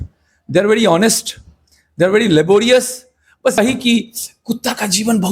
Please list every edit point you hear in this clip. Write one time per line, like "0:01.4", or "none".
0:03.6